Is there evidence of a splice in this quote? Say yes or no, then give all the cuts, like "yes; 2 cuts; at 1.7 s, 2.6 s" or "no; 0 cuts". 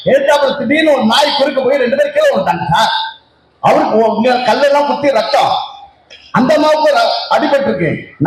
no; 0 cuts